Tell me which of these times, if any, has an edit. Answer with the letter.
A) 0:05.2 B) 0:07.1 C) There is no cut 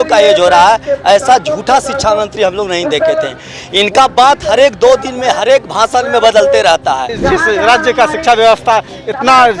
B